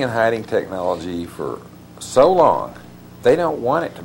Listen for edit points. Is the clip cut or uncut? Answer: uncut